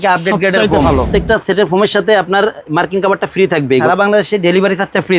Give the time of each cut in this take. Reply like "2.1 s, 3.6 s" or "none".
0.9 s, 3.8 s